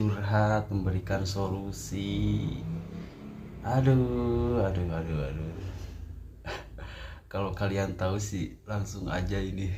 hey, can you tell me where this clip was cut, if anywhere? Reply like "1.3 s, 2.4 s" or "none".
none